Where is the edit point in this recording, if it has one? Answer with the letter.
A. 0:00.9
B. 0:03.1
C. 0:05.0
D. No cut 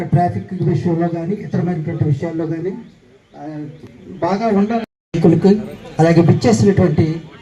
C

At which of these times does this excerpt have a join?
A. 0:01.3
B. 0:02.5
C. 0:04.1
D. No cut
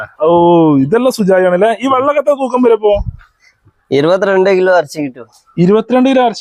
D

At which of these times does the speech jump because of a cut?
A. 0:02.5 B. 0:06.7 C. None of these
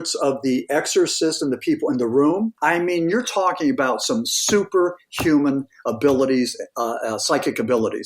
A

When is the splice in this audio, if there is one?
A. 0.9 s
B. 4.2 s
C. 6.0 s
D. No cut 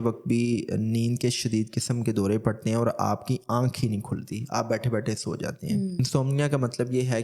C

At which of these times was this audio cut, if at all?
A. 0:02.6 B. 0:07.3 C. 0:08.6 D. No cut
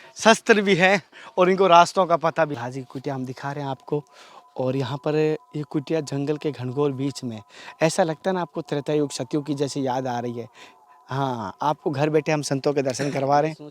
A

